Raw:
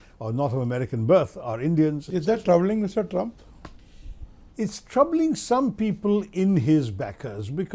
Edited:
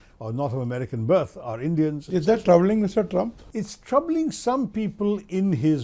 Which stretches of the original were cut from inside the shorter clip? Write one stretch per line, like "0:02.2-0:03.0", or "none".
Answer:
0:03.4-0:04.5